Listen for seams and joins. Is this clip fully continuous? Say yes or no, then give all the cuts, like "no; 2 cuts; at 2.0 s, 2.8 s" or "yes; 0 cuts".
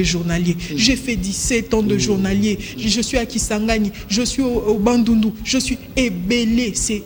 yes; 0 cuts